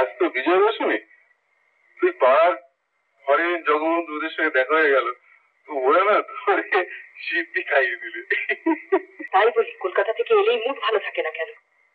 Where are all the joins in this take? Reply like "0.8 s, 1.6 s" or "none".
9.2 s